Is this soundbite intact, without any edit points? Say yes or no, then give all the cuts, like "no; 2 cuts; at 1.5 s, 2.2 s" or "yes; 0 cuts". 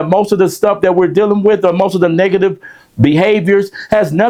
yes; 0 cuts